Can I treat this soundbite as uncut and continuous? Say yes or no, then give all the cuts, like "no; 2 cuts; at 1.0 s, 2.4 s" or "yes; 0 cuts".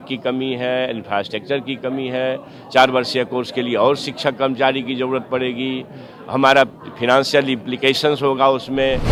yes; 0 cuts